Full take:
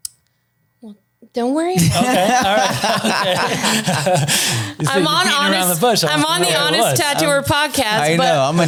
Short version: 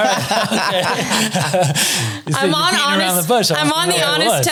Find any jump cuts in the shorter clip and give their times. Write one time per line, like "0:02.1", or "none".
none